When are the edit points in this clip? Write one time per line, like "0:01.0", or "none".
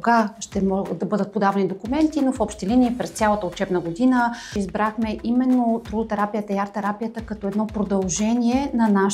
0:04.5